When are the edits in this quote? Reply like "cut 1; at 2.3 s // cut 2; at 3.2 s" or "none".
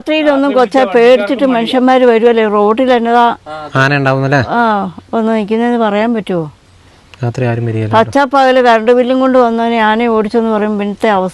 none